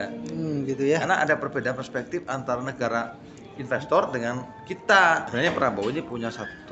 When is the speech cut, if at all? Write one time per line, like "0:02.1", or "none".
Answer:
0:05.3